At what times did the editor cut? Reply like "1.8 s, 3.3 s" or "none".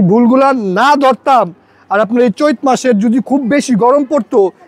none